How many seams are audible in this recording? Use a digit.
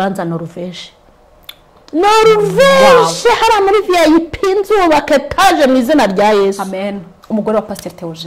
1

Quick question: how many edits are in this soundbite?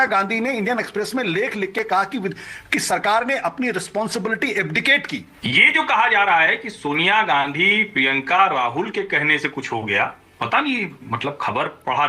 1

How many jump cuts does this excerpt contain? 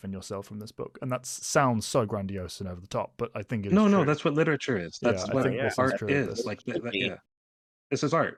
0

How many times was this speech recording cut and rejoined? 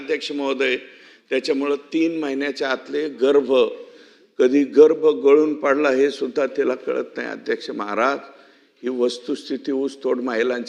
0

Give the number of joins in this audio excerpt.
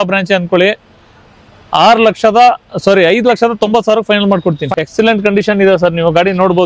1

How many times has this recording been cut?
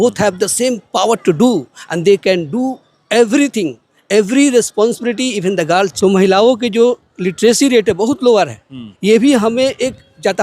1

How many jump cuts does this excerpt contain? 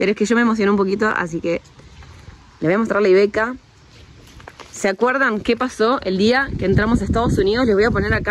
0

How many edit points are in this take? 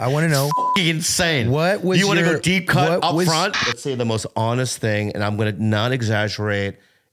1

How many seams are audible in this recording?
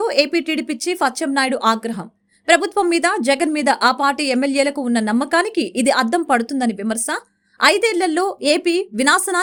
0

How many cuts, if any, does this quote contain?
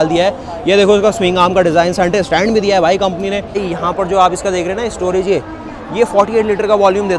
1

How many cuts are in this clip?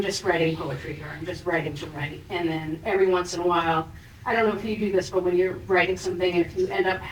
0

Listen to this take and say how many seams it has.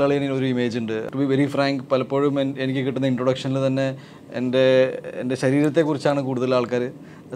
1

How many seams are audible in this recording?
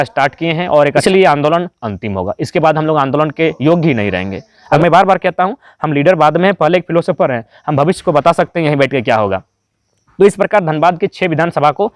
2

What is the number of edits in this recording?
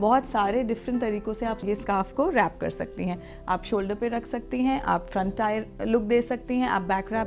1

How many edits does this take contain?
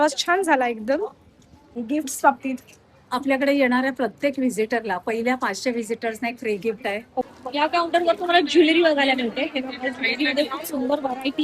2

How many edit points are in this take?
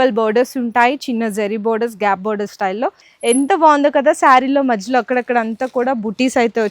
1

